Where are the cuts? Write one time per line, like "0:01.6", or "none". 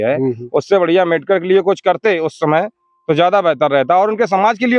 none